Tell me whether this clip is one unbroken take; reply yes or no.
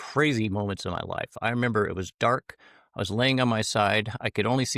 yes